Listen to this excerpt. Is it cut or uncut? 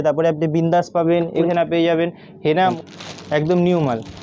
cut